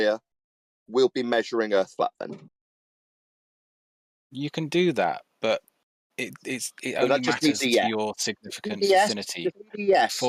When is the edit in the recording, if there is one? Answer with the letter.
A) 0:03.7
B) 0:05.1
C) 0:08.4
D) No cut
D